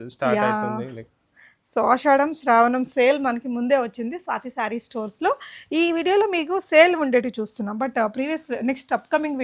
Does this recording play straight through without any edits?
yes; 0 cuts

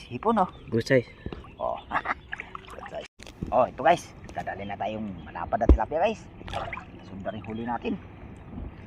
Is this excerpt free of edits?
no; 1 cut; at 3.1 s

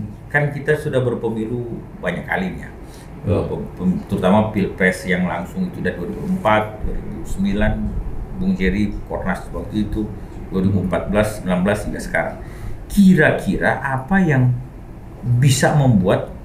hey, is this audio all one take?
yes; 0 cuts

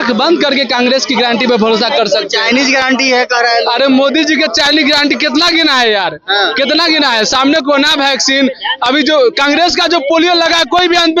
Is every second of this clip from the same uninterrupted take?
yes; 0 cuts

